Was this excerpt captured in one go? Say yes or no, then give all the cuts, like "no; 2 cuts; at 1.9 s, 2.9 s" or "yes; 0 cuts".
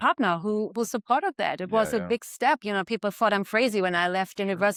yes; 0 cuts